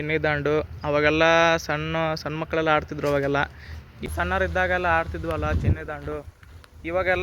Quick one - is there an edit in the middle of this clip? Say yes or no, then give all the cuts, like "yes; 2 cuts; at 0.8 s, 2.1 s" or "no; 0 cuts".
yes; 1 cut; at 4.1 s